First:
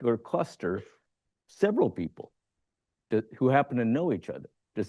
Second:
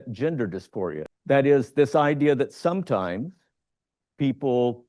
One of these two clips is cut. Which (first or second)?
second